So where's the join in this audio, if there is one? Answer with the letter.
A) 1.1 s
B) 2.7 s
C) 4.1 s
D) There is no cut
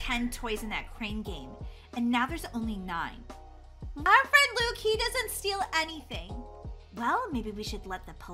C